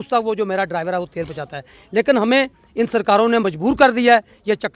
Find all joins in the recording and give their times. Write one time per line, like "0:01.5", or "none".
none